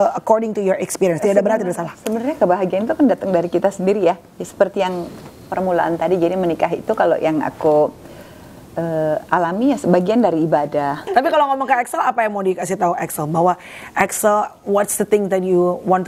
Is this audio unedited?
no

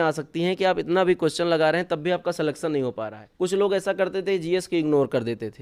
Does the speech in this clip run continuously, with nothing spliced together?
no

